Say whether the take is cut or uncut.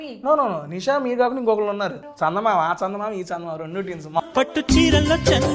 cut